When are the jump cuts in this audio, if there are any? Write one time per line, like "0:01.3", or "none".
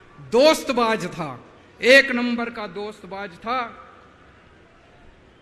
none